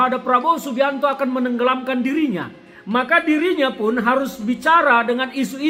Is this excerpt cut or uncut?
uncut